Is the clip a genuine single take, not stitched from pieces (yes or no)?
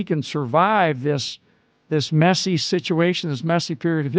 yes